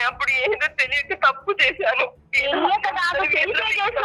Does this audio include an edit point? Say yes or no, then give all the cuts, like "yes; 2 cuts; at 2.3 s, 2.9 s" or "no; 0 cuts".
no; 0 cuts